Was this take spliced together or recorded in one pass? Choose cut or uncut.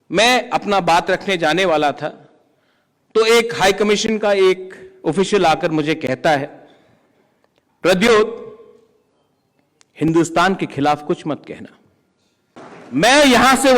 cut